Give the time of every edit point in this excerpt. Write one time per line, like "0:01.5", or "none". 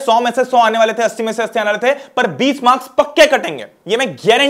none